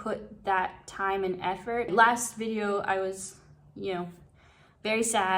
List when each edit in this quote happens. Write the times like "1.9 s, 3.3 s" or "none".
1.9 s